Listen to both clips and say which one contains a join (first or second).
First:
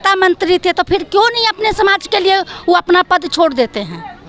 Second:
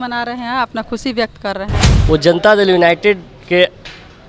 second